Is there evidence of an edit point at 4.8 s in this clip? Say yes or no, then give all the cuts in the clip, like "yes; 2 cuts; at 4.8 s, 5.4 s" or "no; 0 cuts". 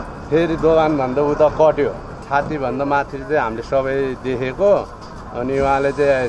no; 1 cut; at 2.2 s